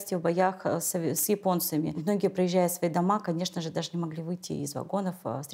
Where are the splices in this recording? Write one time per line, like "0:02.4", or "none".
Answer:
0:02.0